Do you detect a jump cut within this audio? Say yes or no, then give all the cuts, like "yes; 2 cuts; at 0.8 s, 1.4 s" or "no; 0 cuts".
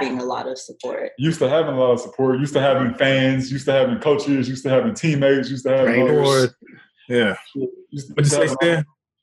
no; 0 cuts